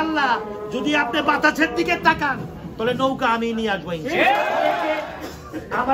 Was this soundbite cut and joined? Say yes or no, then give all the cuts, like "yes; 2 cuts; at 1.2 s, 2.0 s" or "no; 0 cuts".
yes; 1 cut; at 5.0 s